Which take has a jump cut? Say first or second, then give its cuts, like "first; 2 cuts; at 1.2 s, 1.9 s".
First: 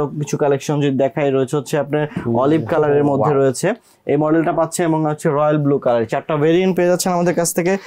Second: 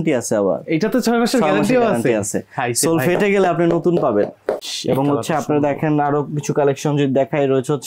second; 1 cut; at 4.7 s